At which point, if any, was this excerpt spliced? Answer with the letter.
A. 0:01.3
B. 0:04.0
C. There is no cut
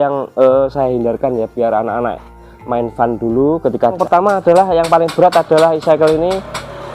B